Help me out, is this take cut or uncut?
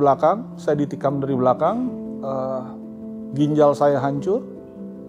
uncut